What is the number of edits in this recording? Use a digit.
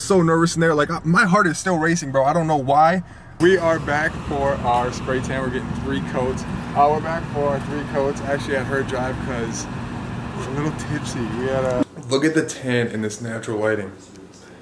3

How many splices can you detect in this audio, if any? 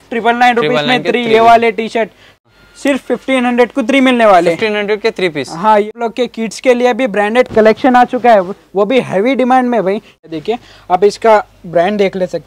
3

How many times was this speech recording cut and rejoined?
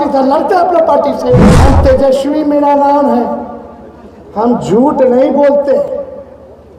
1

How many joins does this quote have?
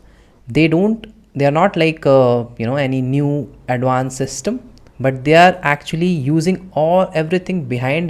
0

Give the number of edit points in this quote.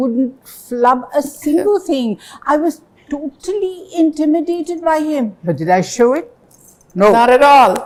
0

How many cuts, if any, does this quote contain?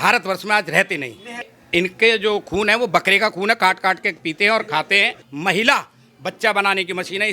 2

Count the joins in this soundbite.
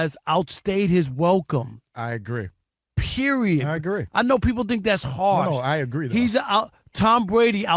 0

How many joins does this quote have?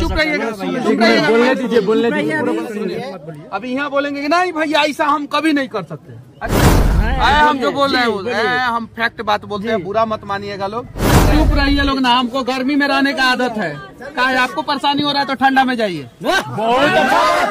2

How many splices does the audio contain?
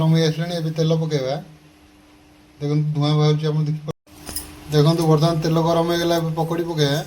1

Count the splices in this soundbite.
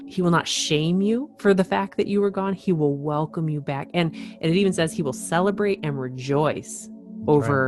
0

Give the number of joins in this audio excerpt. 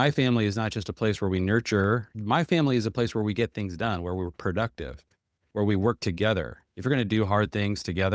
2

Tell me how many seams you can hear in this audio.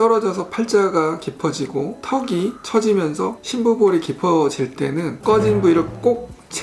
1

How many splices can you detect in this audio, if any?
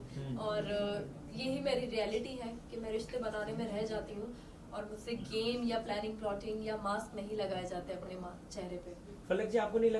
0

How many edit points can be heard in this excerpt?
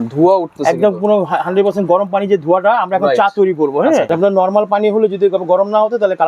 1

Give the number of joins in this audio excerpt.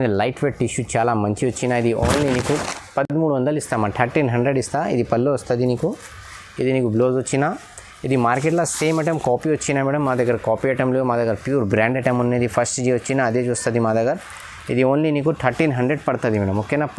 0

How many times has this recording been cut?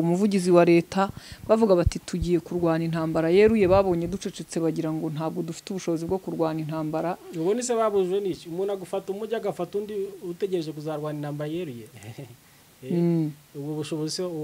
0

